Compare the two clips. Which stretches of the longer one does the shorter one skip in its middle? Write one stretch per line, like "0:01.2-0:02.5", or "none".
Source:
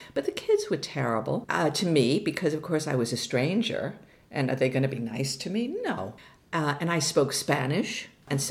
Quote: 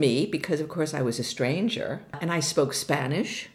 0:04.1-0:06.8